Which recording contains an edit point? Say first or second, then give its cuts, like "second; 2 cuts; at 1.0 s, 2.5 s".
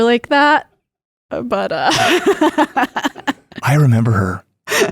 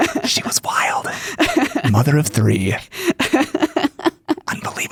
first; 1 cut; at 3.5 s